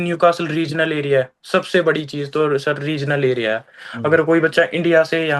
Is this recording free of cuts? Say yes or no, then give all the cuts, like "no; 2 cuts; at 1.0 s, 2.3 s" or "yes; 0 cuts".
yes; 0 cuts